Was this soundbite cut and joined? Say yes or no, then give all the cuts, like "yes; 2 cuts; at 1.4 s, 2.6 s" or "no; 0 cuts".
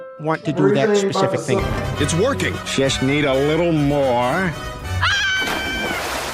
yes; 1 cut; at 1.6 s